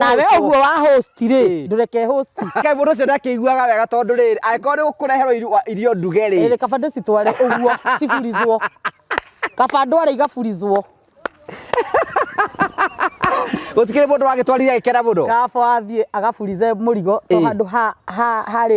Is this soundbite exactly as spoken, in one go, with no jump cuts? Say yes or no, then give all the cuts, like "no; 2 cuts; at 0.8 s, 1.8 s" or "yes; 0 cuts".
no; 1 cut; at 2.6 s